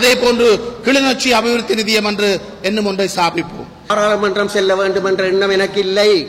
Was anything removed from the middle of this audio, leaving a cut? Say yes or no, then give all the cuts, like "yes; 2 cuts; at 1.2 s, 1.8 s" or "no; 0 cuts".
yes; 1 cut; at 3.9 s